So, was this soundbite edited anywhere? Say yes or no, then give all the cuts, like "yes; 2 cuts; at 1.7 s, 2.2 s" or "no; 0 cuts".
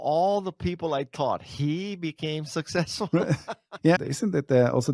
yes; 1 cut; at 4.0 s